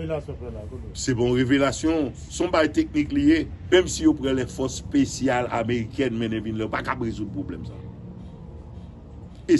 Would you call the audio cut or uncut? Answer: cut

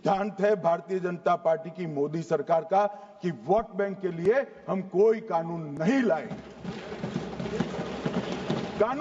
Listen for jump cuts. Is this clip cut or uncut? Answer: uncut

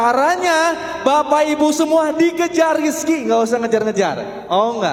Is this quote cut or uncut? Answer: uncut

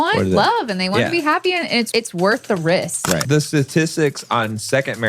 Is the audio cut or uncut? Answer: cut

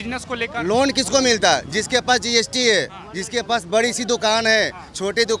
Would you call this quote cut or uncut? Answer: uncut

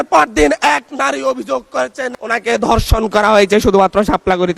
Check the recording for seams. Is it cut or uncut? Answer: uncut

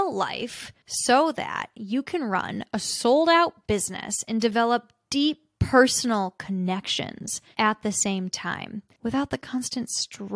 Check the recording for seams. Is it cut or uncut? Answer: uncut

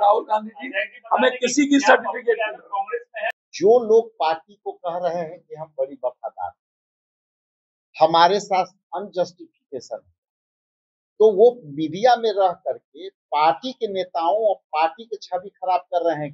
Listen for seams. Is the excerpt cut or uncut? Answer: cut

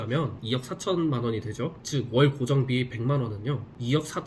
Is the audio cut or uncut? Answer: uncut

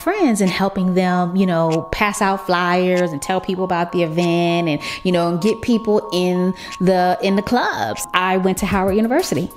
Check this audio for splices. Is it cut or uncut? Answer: cut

